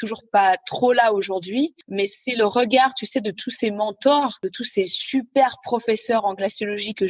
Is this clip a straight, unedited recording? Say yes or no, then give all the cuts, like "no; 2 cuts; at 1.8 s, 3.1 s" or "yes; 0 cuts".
no; 2 cuts; at 1.9 s, 4.4 s